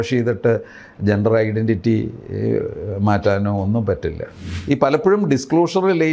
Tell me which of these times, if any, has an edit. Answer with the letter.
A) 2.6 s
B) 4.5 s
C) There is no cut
B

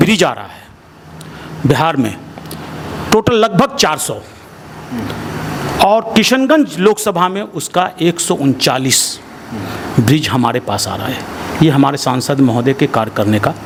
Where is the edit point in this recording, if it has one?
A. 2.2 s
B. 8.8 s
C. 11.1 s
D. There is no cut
D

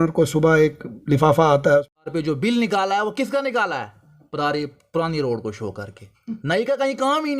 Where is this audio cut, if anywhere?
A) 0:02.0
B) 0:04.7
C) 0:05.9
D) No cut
A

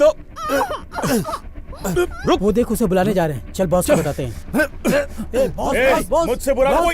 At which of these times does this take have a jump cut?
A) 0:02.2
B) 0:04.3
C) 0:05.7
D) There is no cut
A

